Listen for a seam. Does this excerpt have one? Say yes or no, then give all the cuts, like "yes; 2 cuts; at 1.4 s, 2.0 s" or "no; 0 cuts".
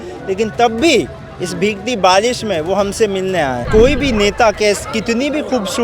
yes; 1 cut; at 3.6 s